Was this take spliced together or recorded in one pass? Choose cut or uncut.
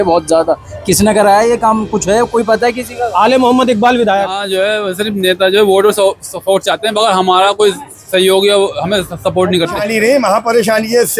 cut